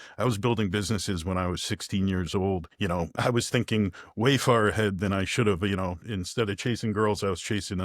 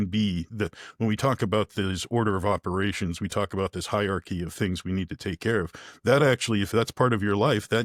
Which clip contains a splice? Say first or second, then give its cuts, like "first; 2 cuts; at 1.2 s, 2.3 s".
first; 1 cut; at 3.0 s